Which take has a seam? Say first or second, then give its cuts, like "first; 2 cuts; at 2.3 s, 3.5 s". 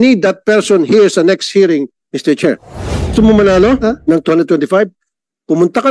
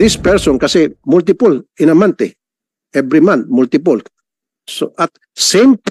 first; 1 cut; at 3.1 s